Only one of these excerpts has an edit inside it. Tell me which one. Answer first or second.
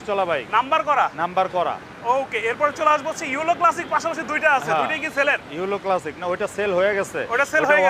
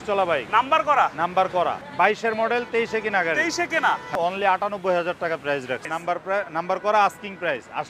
second